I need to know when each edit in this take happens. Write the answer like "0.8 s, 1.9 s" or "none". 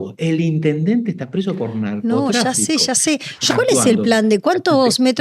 3.5 s